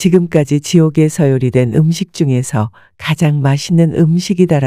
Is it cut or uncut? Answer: uncut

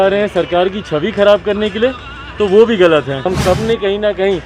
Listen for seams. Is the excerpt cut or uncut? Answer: cut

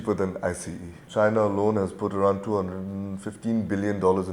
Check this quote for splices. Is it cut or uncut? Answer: cut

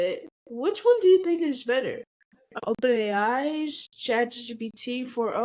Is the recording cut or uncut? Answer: cut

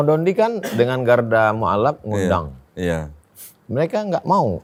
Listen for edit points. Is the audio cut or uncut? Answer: uncut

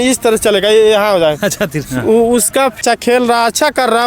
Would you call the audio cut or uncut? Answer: cut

